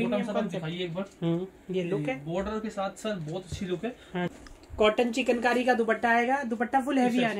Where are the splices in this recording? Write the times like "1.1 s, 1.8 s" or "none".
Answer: 4.3 s